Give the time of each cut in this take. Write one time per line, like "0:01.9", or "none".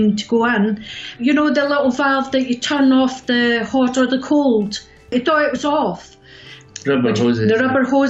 0:01.1
0:05.1
0:06.7